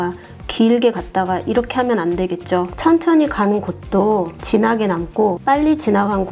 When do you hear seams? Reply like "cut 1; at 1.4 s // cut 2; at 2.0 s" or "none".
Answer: cut 1; at 2.7 s // cut 2; at 4.4 s // cut 3; at 5.4 s